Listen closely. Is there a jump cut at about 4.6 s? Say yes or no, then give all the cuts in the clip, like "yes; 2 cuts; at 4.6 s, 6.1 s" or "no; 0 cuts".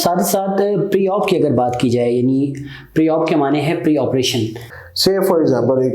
yes; 1 cut; at 4.6 s